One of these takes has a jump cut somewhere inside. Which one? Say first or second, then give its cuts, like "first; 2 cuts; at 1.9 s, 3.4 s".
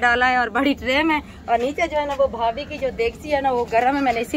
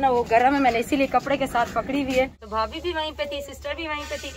second; 1 cut; at 2.4 s